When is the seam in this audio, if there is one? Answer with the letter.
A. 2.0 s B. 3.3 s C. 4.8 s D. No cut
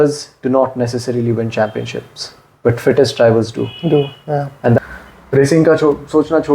C